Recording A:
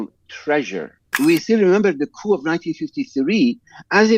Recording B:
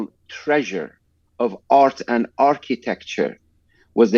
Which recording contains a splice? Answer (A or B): A